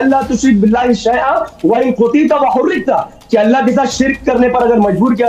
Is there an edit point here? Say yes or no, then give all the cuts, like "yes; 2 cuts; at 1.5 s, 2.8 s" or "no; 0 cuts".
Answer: no; 0 cuts